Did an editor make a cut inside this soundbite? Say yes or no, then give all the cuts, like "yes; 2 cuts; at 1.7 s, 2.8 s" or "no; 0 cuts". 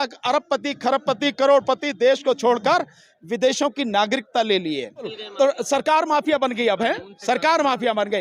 yes; 1 cut; at 5.2 s